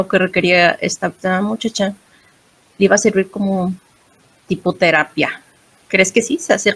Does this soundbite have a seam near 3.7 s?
no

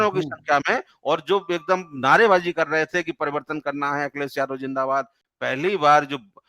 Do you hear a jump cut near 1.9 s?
no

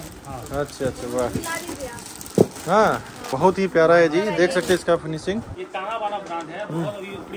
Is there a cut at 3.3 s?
yes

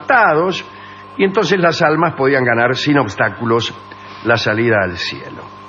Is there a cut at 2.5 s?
yes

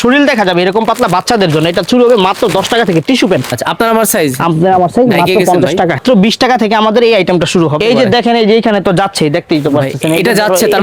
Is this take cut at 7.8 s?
yes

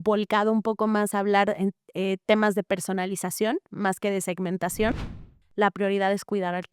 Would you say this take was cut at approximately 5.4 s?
yes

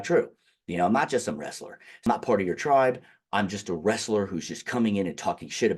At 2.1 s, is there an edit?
yes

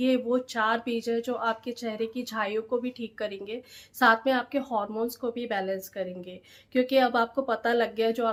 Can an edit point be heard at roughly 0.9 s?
no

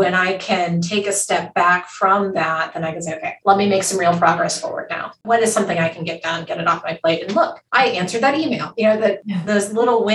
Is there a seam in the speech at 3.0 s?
no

